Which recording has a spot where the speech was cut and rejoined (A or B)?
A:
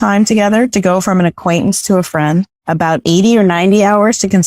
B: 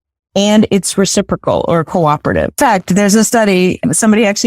B